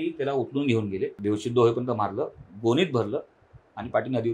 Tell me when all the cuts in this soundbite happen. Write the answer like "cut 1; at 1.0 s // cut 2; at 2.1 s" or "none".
cut 1; at 1.2 s